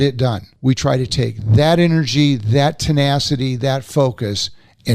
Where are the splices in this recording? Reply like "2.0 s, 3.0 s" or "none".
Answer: none